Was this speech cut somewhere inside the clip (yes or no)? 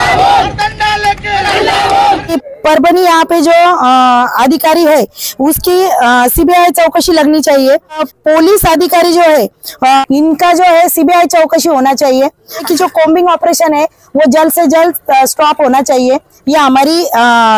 yes